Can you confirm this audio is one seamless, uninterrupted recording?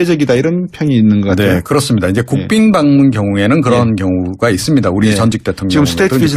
yes; 0 cuts

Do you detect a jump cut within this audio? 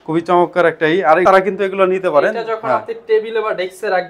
yes; 1 cut; at 1.2 s

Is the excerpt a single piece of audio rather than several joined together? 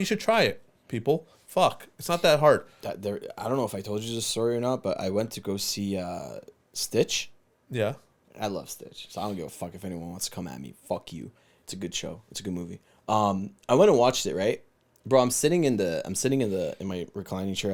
yes; 0 cuts

